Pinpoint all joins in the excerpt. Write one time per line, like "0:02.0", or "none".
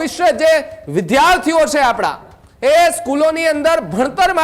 none